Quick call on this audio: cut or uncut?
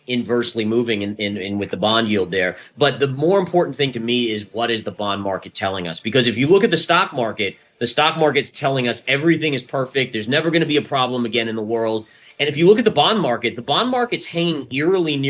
uncut